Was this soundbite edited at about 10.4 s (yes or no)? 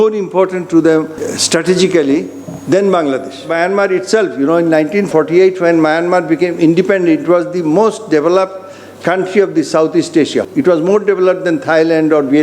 yes